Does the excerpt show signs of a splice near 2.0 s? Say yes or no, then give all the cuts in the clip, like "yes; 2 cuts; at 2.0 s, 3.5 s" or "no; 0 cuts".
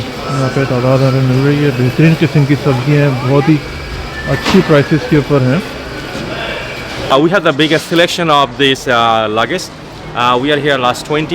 no; 1 cut; at 7.1 s